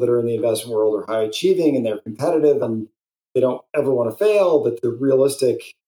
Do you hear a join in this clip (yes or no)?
yes